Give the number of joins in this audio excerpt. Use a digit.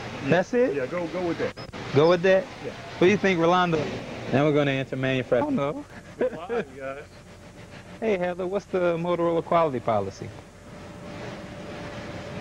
1